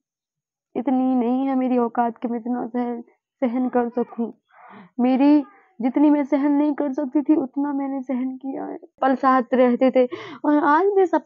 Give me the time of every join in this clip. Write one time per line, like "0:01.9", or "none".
0:09.0